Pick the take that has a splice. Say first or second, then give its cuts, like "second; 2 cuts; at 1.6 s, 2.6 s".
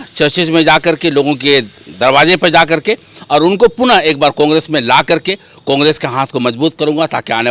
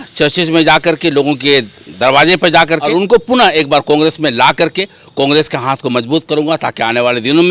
second; 1 cut; at 2.9 s